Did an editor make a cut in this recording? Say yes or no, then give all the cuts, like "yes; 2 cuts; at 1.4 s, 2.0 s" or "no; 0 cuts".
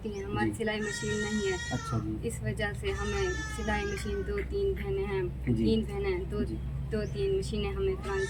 no; 0 cuts